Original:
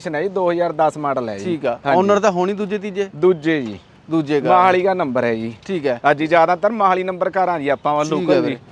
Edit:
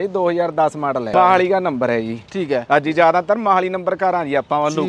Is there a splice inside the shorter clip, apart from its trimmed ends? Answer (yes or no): yes